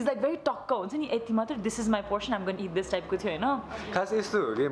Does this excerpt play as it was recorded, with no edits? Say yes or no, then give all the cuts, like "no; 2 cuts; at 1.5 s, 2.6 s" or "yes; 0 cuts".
yes; 0 cuts